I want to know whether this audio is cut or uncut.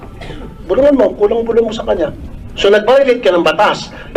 cut